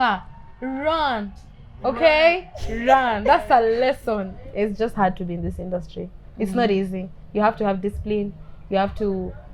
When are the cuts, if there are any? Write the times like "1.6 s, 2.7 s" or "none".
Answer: 4.4 s